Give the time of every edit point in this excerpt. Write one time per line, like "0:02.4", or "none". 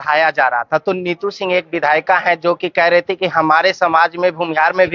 none